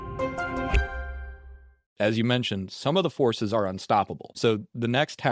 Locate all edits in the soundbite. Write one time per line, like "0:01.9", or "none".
0:01.9